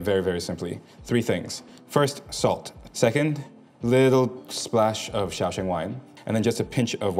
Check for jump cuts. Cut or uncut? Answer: cut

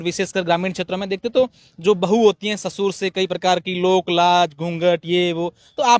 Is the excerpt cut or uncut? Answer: uncut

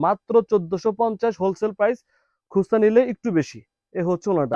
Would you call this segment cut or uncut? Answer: uncut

